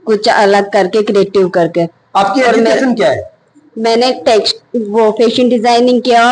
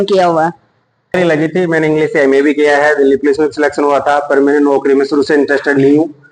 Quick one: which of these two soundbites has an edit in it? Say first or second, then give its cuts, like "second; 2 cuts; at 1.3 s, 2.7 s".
second; 1 cut; at 1.1 s